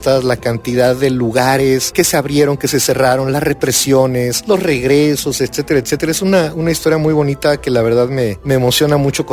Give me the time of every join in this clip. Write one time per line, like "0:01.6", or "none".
0:01.9
0:04.4
0:08.4